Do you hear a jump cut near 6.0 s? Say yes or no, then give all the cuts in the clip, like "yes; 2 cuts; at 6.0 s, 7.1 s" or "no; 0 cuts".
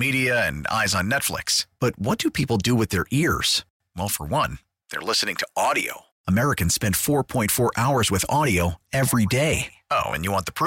no; 0 cuts